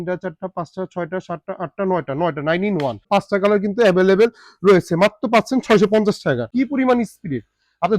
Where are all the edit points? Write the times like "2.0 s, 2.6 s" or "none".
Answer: 3.1 s, 6.5 s

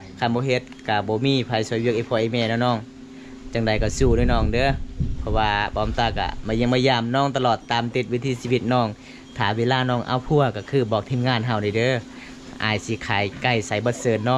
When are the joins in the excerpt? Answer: none

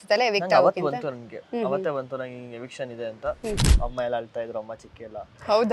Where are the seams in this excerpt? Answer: 3.7 s

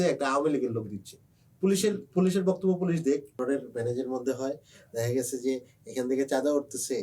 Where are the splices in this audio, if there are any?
3.4 s

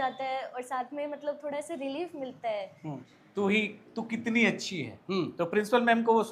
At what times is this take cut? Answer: 3.1 s

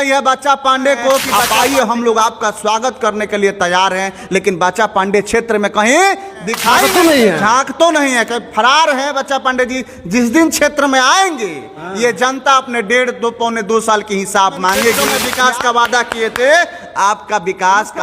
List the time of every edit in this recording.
1.4 s, 6.8 s, 15.0 s

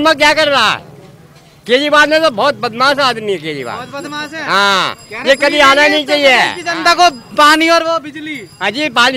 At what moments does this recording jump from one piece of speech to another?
none

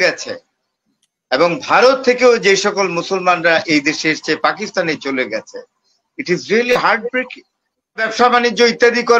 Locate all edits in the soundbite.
8.1 s

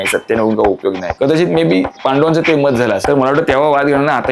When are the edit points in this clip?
1.1 s, 1.9 s, 3.0 s

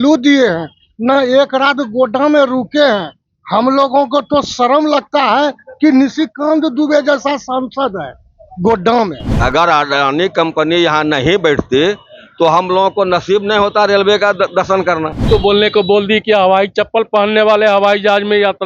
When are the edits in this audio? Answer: 9.4 s, 15.2 s

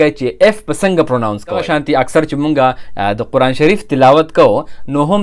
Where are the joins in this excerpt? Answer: 1.6 s

